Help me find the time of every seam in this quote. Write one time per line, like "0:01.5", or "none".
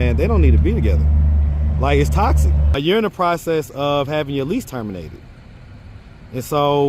0:02.7